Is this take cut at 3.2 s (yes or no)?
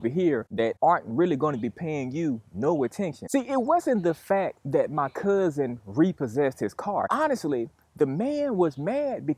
yes